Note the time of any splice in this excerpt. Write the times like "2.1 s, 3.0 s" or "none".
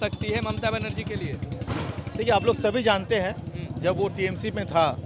none